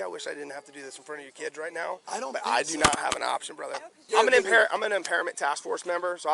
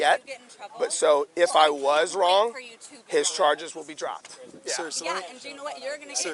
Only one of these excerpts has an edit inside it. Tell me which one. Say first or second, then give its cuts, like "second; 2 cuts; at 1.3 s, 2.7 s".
first; 1 cut; at 4.0 s